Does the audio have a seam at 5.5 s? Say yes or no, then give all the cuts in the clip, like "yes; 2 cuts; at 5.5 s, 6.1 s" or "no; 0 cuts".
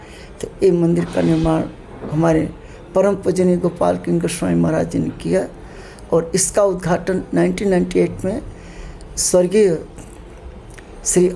no; 0 cuts